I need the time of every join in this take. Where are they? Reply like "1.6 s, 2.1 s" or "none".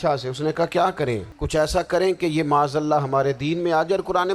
1.3 s

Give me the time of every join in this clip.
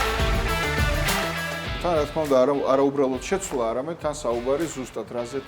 1.8 s

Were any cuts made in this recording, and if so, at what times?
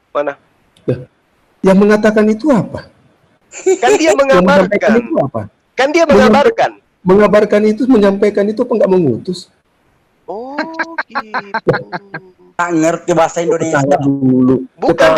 none

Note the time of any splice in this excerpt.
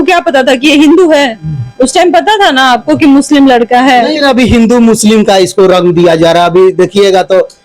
4.1 s

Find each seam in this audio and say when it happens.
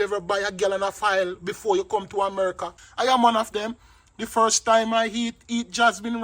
2.8 s

